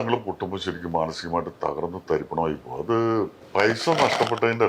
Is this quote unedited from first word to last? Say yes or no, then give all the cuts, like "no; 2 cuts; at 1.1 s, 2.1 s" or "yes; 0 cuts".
no; 1 cut; at 3.4 s